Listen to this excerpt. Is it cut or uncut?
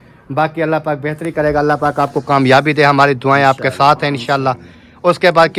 uncut